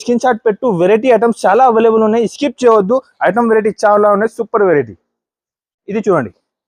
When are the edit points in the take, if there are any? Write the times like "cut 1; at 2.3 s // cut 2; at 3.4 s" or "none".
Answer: none

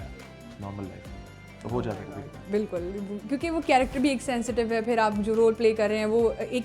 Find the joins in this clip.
none

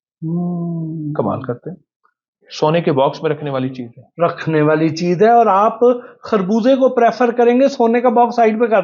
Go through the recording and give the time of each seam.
cut 1; at 2.4 s

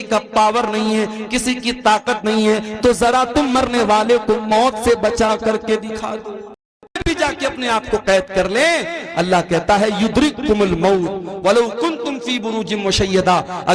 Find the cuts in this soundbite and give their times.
cut 1; at 7.0 s

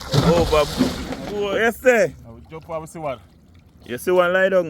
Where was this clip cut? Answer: cut 1; at 1.2 s

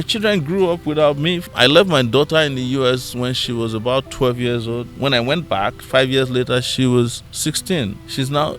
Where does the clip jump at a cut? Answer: cut 1; at 1.5 s // cut 2; at 7.7 s

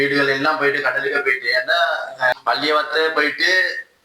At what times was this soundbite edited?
cut 1; at 2.4 s

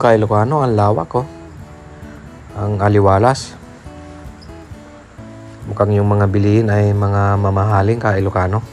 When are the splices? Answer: none

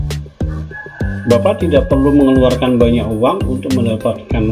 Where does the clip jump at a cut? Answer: cut 1; at 1.2 s

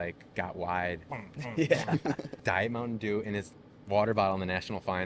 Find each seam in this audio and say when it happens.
cut 1; at 1.1 s // cut 2; at 2.3 s

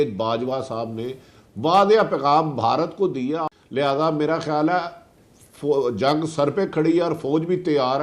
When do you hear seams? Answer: cut 1; at 3.4 s

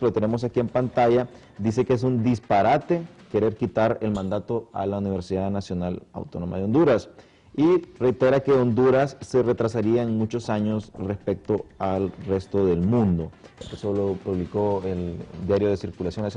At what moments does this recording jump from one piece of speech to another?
cut 1; at 11.0 s

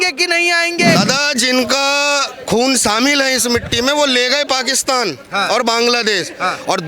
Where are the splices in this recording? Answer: cut 1; at 1.0 s

